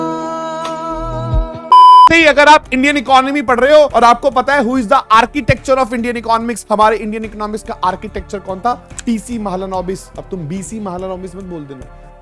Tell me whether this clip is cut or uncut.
cut